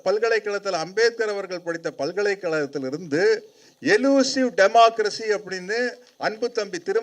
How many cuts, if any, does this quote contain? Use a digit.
0